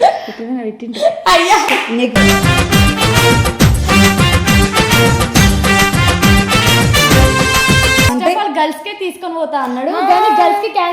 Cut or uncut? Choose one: cut